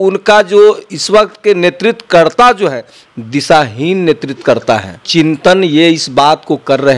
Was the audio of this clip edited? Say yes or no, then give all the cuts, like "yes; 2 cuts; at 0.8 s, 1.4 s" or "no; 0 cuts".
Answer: yes; 1 cut; at 5.1 s